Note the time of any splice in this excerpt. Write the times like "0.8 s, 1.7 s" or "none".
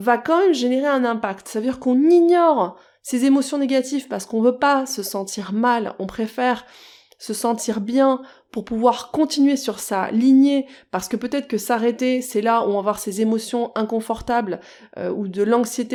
none